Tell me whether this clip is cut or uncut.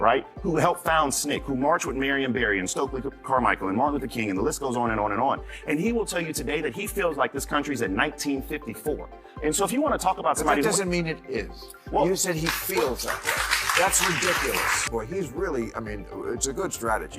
cut